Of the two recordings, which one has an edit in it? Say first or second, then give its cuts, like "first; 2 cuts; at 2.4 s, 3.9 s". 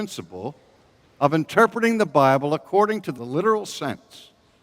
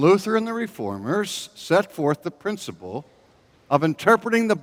first; 1 cut; at 3.2 s